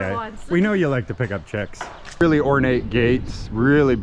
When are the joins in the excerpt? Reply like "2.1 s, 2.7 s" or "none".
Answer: 2.2 s